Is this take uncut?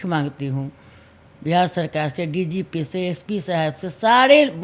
yes; 0 cuts

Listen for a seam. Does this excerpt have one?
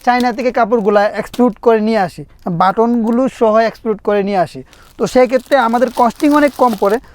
no; 0 cuts

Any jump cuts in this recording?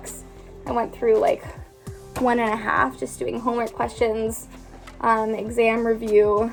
no; 0 cuts

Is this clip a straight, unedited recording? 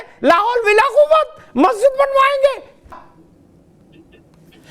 no; 1 cut; at 3.0 s

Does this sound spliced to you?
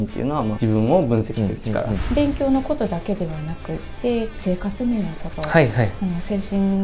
yes; 1 cut; at 2.0 s

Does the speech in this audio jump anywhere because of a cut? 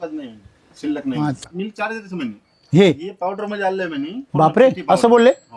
yes; 2 cuts; at 1.4 s, 4.2 s

